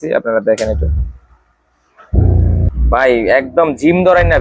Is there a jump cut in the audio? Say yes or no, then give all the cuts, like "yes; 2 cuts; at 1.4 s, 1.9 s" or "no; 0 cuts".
yes; 1 cut; at 2.7 s